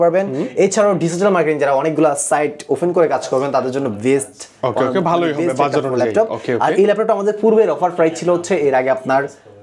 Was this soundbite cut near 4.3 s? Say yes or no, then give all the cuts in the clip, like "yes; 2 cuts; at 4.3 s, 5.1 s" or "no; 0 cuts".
no; 0 cuts